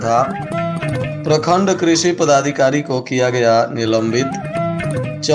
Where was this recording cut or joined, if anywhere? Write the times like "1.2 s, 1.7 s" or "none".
none